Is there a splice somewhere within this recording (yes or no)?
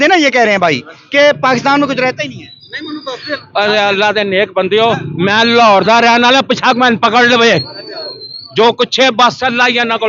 no